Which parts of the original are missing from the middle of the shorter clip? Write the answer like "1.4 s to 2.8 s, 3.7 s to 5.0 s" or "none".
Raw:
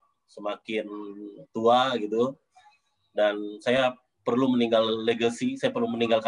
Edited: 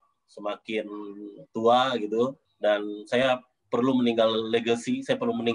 2.4 s to 3.0 s